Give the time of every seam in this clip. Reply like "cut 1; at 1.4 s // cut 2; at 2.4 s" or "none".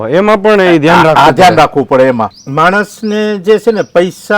cut 1; at 2.4 s